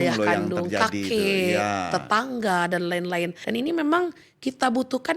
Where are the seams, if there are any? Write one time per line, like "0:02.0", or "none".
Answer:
0:03.4